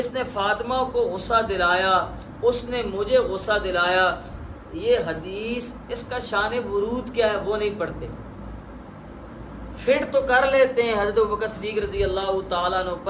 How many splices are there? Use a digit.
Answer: 1